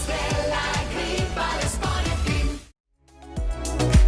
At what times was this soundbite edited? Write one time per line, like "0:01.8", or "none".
0:02.9